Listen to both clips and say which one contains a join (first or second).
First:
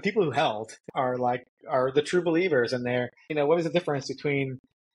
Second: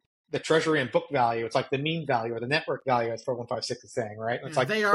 first